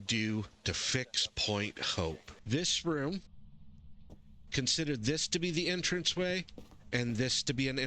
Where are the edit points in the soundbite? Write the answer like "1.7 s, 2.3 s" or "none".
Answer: 2.3 s